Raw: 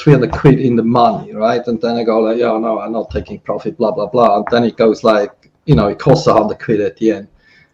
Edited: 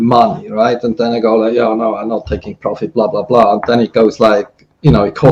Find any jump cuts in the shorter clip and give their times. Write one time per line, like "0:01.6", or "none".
none

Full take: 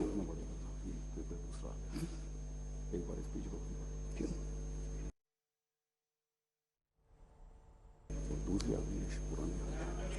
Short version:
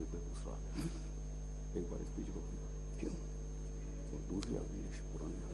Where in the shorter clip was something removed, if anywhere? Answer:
0:03.9

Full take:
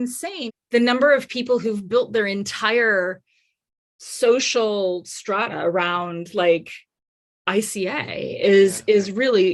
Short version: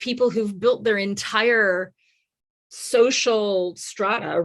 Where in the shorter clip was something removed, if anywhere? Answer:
none

